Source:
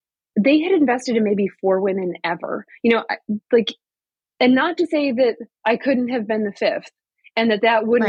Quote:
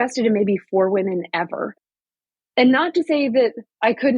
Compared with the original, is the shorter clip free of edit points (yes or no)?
no